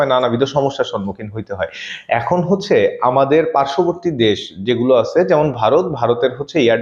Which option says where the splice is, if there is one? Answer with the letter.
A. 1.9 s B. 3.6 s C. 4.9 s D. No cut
D